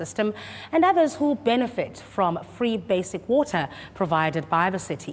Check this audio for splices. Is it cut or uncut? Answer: cut